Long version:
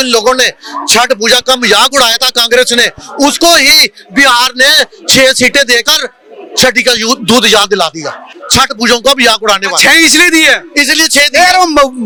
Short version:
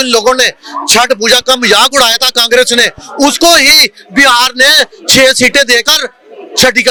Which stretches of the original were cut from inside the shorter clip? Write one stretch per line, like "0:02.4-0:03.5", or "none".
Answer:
none